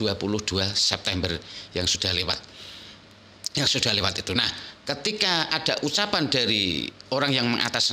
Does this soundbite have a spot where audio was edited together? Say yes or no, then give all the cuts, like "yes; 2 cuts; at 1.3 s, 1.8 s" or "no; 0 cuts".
no; 0 cuts